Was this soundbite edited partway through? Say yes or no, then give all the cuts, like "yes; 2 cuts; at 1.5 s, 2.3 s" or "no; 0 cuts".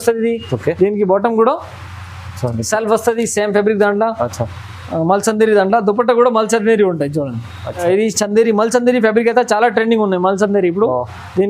yes; 1 cut; at 7.8 s